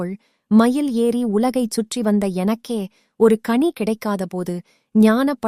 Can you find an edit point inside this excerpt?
no; 0 cuts

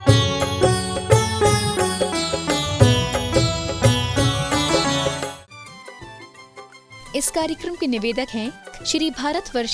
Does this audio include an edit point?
yes; 1 cut; at 5.4 s

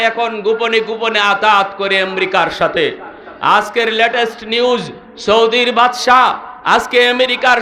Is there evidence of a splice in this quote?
no; 0 cuts

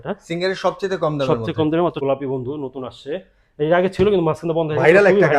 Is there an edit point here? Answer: yes; 1 cut; at 2.0 s

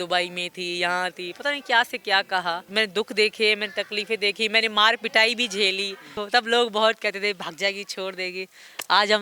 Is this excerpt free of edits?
no; 2 cuts; at 2.7 s, 6.2 s

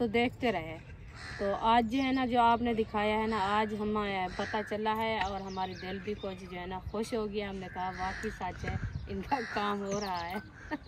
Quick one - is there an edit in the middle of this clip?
no; 0 cuts

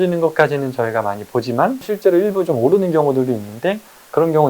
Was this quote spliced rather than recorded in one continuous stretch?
yes; 1 cut; at 1.8 s

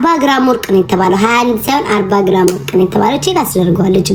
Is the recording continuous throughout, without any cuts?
yes; 0 cuts

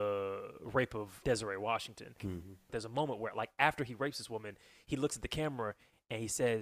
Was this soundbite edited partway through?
yes; 2 cuts; at 1.1 s, 2.5 s

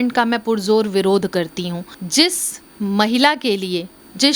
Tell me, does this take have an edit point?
no; 0 cuts

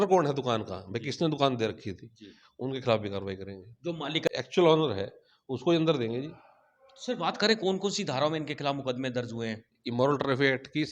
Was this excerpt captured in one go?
no; 1 cut; at 4.3 s

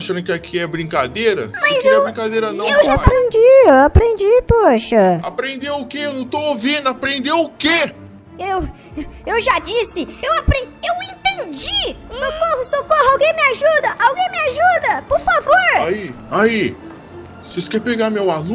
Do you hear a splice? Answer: yes; 3 cuts; at 2.9 s, 10.1 s, 12.2 s

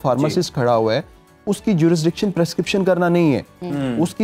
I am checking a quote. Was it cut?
no; 0 cuts

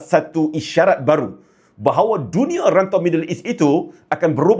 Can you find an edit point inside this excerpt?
no; 0 cuts

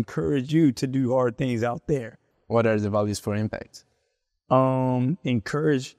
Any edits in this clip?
yes; 1 cut; at 2.3 s

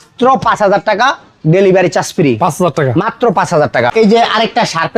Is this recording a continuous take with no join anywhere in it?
yes; 0 cuts

